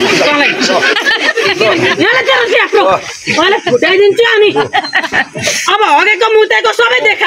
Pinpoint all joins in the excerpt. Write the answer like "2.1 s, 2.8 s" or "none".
none

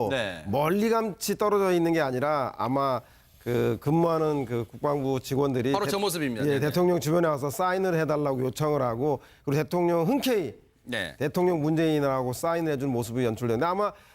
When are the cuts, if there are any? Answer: 13.1 s

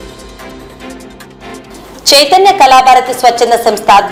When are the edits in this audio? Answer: none

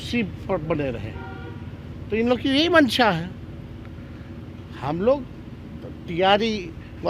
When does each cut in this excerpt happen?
none

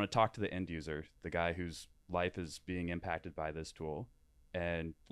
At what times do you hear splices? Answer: none

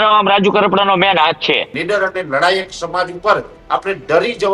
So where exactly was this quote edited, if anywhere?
1.7 s

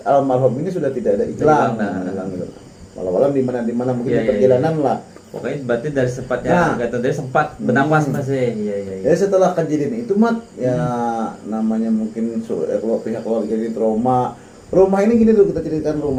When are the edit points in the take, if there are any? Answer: none

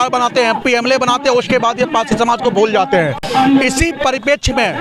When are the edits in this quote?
none

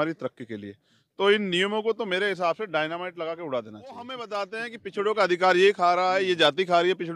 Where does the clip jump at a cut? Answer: 4.3 s

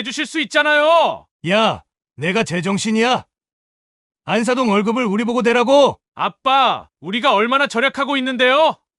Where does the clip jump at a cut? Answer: 1.3 s

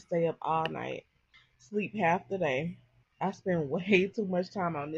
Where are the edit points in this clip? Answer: 2.7 s

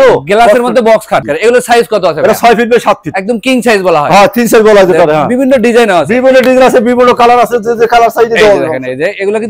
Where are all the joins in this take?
1.2 s

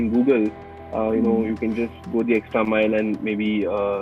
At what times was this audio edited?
none

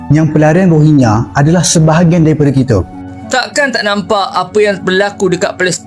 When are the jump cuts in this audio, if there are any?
3.1 s

